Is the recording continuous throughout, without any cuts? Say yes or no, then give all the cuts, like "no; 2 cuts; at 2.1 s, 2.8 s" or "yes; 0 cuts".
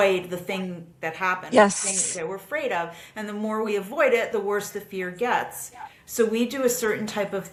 yes; 0 cuts